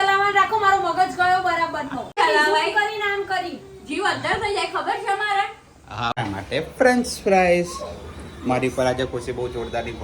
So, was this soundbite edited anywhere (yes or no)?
yes